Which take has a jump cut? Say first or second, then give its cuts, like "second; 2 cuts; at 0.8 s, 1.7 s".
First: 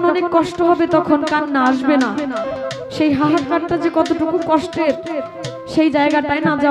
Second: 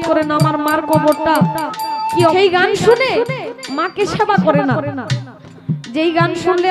second; 1 cut; at 2.3 s